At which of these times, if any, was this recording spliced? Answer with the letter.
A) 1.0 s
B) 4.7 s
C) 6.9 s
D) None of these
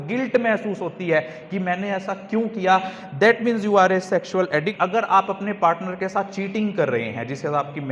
B